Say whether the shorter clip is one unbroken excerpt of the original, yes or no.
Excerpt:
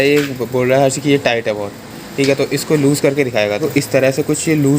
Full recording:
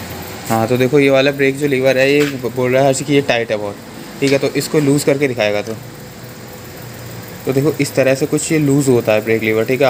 no